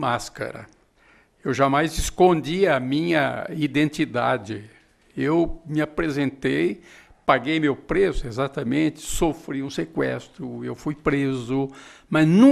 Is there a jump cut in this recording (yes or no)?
no